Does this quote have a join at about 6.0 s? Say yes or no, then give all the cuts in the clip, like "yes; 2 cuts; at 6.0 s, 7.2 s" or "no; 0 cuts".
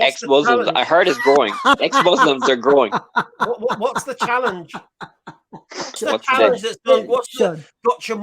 yes; 1 cut; at 6.0 s